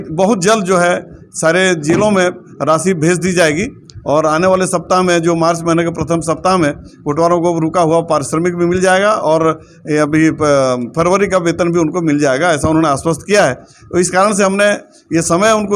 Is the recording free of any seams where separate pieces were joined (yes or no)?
yes